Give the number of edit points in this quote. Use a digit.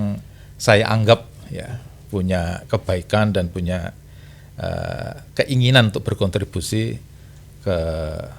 0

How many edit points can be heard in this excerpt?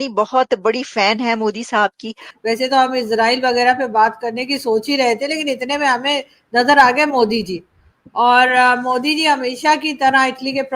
1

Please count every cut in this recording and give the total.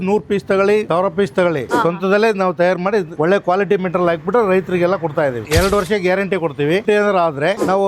3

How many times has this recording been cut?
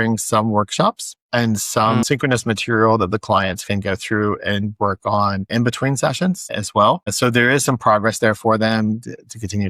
3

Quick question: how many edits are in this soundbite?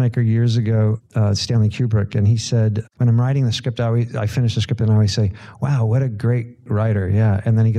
3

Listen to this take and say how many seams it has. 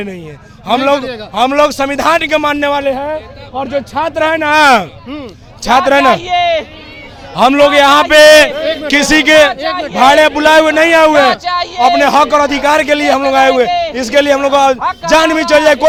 0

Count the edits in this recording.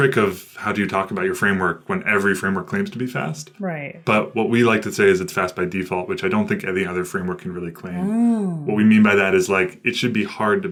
0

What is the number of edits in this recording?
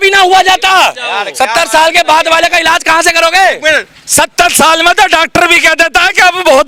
0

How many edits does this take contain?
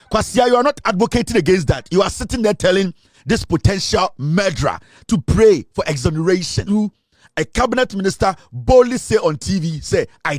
1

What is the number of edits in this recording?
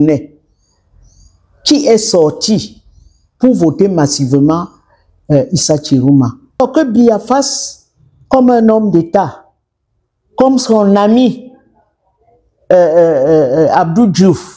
1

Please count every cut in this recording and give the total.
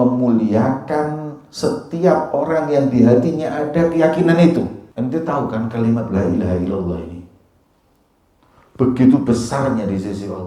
1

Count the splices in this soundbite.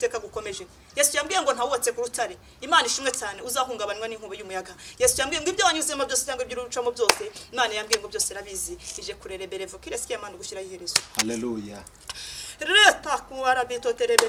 0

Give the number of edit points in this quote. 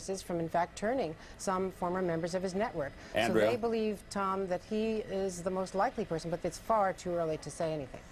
1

